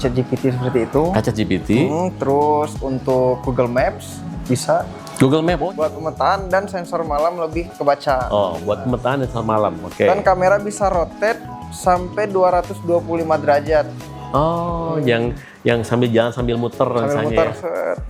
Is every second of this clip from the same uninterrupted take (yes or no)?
no